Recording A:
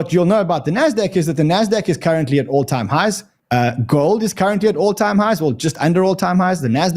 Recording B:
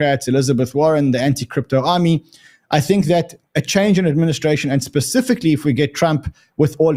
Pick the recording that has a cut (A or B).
A